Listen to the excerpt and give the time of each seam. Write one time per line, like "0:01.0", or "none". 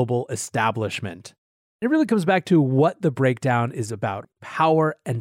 0:01.8
0:04.3